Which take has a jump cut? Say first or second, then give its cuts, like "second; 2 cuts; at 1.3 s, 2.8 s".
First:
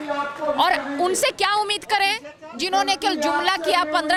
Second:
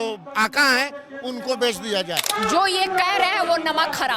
second; 1 cut; at 2.3 s